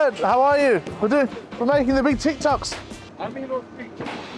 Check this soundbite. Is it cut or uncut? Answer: uncut